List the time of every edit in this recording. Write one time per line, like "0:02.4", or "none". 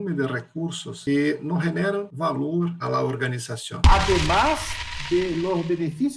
0:00.9
0:02.4
0:03.8